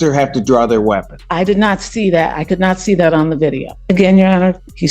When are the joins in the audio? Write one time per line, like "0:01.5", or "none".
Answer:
0:01.2
0:03.7